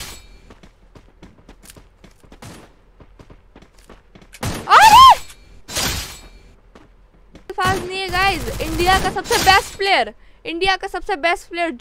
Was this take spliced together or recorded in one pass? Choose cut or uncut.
cut